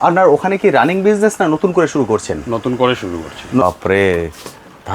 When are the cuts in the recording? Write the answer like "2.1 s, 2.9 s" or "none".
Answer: 3.6 s

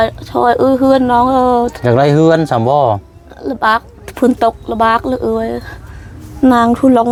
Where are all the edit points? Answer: none

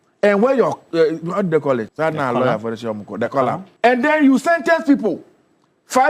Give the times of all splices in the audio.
1.9 s, 3.7 s

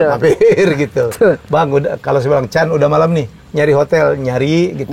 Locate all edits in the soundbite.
none

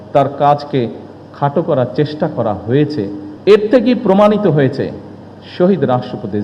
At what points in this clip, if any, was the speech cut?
3.2 s

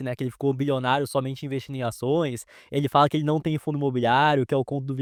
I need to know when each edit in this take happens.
none

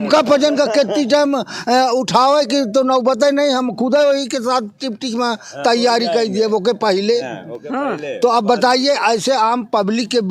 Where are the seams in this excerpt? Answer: none

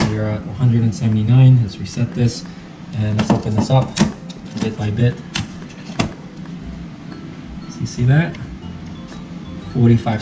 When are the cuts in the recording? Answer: none

